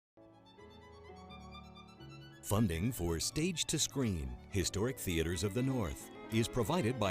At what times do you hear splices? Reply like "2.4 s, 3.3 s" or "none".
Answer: 2.5 s